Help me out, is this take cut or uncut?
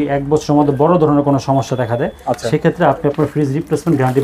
uncut